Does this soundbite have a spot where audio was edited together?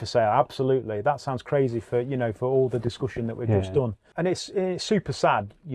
yes; 1 cut; at 4.0 s

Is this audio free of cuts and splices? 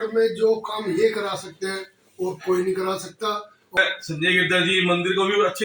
no; 1 cut; at 3.5 s

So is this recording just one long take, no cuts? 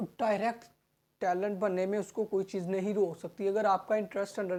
yes; 0 cuts

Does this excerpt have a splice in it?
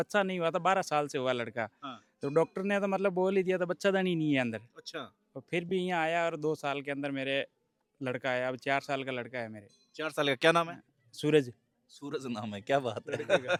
no; 0 cuts

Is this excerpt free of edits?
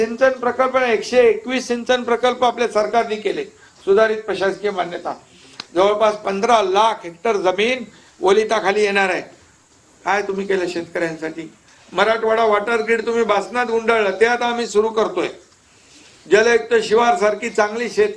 yes; 0 cuts

